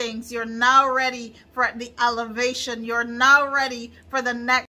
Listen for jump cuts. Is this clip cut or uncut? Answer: uncut